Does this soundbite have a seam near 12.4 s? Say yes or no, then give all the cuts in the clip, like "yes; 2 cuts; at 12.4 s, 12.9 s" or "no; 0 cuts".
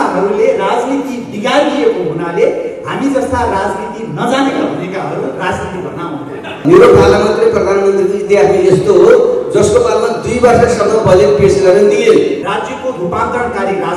yes; 2 cuts; at 6.6 s, 12.4 s